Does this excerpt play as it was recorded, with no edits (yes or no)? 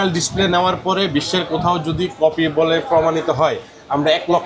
yes